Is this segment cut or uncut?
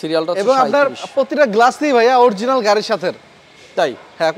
uncut